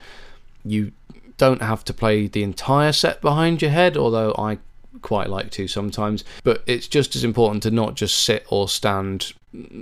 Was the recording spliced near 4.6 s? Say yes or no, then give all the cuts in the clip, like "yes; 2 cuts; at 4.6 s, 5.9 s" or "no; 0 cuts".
no; 1 cut; at 6.3 s